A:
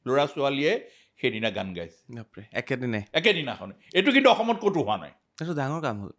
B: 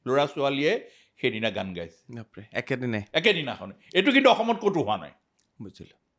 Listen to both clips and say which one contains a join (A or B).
A